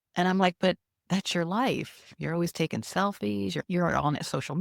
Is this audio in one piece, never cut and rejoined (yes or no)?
no